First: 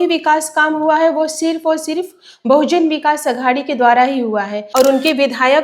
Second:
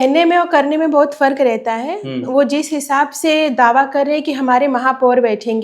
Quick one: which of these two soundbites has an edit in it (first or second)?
first